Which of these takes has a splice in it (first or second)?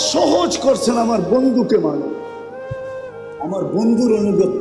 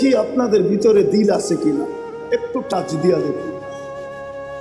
first